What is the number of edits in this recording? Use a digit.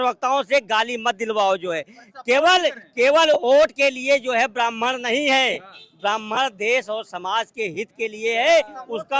0